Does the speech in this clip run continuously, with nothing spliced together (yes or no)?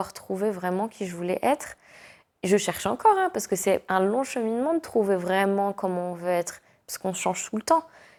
yes